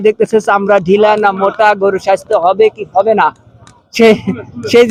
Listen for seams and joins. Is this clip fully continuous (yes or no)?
yes